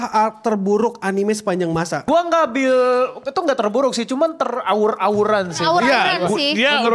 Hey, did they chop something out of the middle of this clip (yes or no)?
yes